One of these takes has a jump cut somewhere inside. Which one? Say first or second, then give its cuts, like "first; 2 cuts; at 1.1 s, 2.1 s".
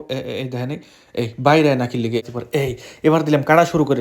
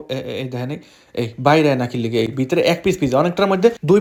first; 1 cut; at 2.3 s